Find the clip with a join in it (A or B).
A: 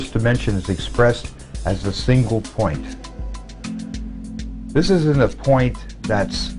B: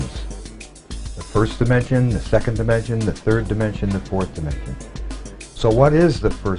A